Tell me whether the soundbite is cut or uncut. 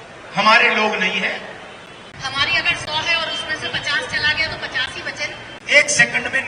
cut